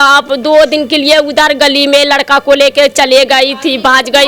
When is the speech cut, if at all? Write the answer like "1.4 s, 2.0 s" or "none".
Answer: none